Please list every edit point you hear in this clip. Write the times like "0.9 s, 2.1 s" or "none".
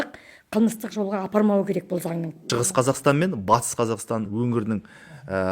2.3 s, 4.3 s

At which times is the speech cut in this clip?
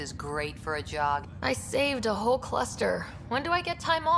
1.3 s

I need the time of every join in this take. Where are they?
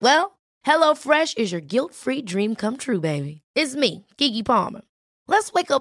none

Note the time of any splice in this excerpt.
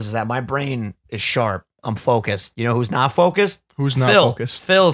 2.5 s

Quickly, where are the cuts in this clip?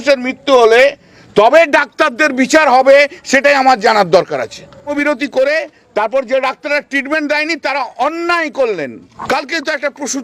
4.9 s, 9.1 s

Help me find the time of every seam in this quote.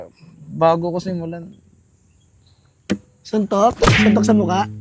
none

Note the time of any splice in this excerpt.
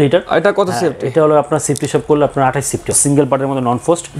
3.0 s

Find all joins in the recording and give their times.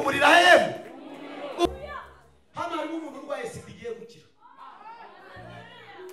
1.7 s

